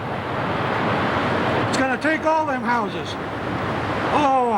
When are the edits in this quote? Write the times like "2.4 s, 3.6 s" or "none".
none